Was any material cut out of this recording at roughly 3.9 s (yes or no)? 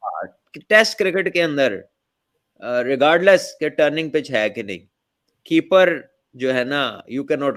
no